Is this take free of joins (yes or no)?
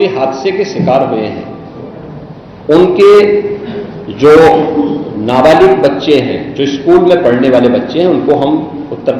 yes